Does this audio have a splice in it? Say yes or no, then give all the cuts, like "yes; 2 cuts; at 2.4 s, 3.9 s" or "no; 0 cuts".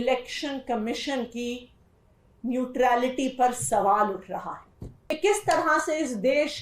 yes; 1 cut; at 5.2 s